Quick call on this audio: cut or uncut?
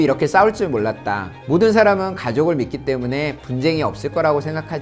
uncut